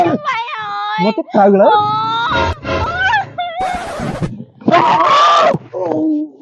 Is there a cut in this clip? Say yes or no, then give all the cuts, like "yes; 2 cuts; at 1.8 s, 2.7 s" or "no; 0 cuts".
yes; 1 cut; at 3.8 s